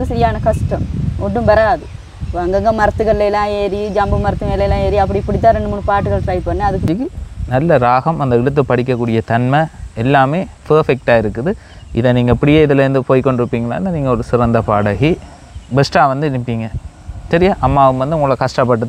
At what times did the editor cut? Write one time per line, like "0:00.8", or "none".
0:06.9